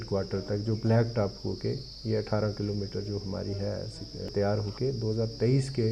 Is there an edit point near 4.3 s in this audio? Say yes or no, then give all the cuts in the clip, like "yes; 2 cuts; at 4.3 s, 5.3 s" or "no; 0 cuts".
yes; 1 cut; at 4.3 s